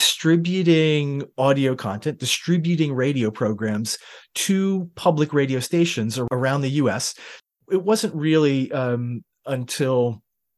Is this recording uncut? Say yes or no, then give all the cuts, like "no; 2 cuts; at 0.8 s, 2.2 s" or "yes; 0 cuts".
no; 2 cuts; at 6.3 s, 7.5 s